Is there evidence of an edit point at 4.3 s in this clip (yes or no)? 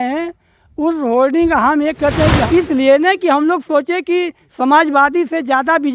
no